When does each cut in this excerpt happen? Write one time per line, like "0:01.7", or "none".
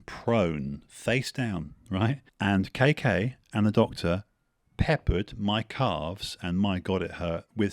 0:02.3